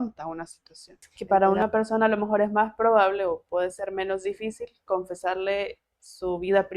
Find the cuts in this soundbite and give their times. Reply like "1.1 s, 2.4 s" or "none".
1.1 s